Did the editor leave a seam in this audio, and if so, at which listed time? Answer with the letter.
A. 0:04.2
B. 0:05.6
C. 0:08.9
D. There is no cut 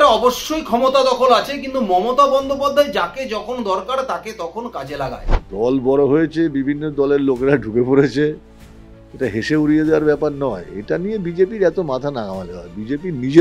B